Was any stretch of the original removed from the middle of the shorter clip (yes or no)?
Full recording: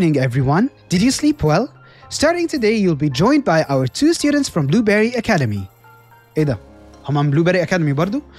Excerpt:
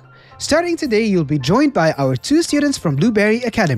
no